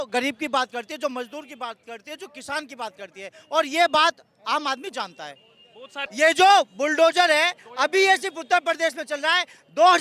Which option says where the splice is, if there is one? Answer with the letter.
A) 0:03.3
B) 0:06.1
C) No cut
B